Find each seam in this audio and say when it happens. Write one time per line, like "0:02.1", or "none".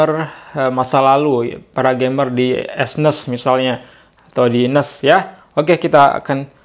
none